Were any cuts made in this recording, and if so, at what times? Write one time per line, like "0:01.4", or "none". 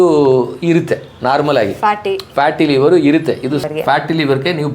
0:03.7